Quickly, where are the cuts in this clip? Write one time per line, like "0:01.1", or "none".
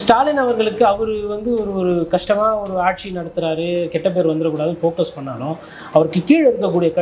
none